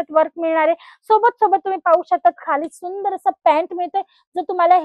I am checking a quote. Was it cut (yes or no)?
no